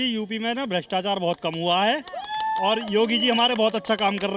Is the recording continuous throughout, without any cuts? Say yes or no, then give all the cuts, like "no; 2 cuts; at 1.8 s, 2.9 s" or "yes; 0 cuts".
yes; 0 cuts